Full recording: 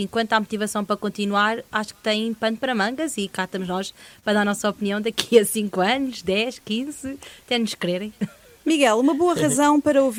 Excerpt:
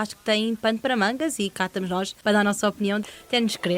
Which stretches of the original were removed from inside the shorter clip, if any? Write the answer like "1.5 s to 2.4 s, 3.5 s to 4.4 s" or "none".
3.9 s to 4.1 s, 5.0 s to 7.2 s